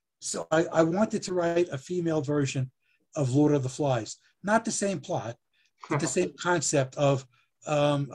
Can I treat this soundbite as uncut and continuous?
yes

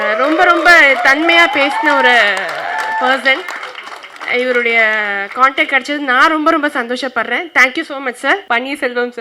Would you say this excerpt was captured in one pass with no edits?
yes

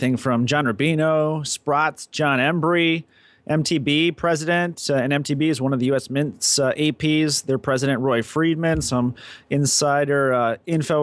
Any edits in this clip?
no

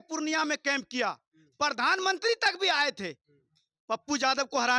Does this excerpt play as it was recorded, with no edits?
yes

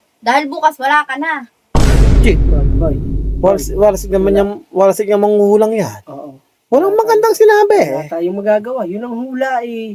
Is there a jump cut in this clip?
no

